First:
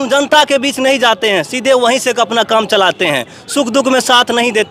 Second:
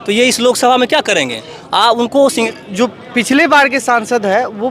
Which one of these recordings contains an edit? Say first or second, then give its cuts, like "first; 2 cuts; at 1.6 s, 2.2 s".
second; 1 cut; at 2.5 s